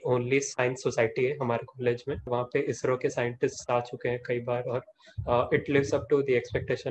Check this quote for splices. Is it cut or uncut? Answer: cut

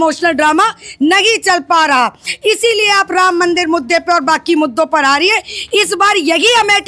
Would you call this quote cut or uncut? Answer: uncut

